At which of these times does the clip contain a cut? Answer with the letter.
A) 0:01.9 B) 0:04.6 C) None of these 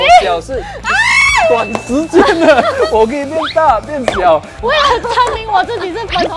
B